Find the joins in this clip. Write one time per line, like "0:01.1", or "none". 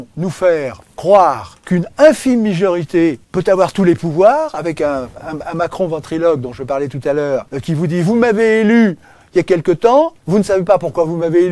0:01.5
0:03.3
0:07.5